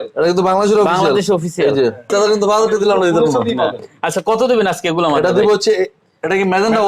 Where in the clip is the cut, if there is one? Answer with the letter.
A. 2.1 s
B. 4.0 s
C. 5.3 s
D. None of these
A